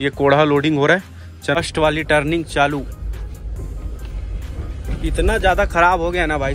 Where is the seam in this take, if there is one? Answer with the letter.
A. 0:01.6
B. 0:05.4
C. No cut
A